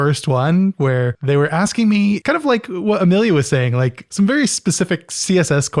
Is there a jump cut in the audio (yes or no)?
yes